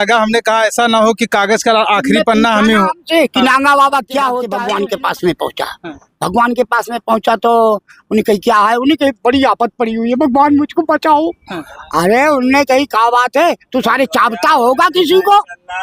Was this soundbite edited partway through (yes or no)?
yes